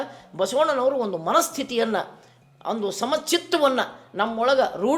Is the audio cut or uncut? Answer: uncut